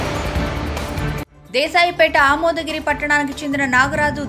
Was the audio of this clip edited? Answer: yes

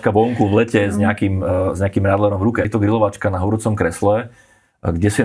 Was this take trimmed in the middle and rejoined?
yes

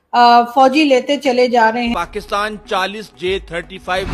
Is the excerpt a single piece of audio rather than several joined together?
no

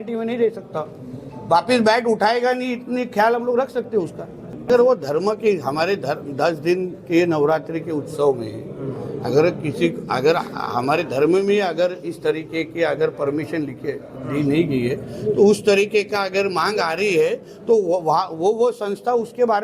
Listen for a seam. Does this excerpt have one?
yes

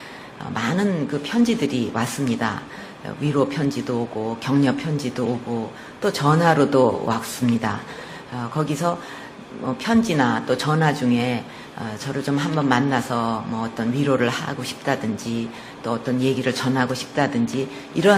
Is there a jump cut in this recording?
no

